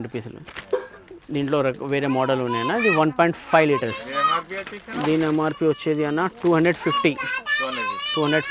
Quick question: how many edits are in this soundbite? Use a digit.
0